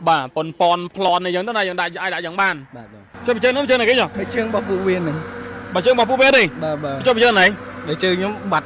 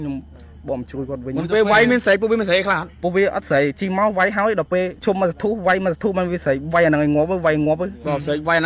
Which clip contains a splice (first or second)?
second